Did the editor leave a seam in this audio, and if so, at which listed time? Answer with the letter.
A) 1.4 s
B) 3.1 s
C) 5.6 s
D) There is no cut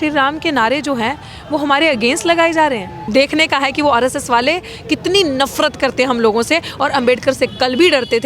B